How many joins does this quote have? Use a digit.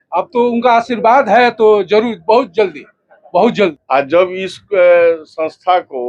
1